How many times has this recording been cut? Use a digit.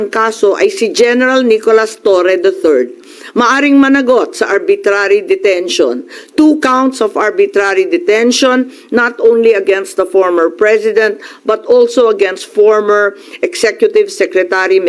0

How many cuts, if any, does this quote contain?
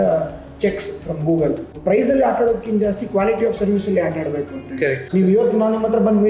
2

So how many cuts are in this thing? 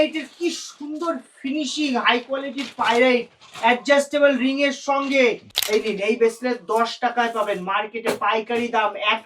1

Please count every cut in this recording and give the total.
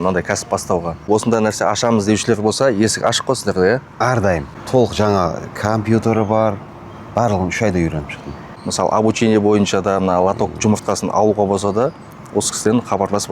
3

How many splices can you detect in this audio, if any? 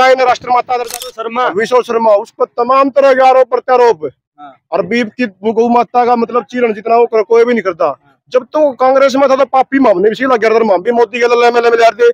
1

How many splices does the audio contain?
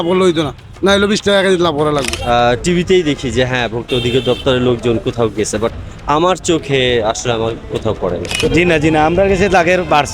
2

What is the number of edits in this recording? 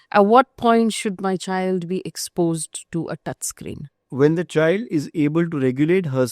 1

